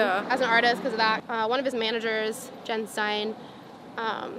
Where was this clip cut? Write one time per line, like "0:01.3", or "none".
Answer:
0:01.2